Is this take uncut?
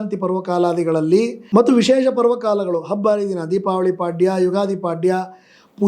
no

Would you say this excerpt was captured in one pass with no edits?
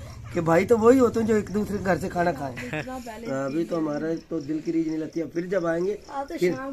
no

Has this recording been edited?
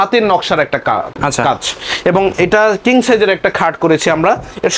no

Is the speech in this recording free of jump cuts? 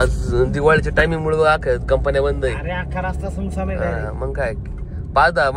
yes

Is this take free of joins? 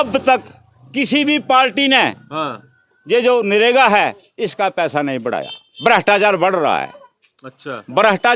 yes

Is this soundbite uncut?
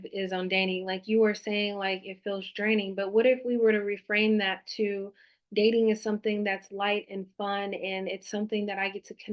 yes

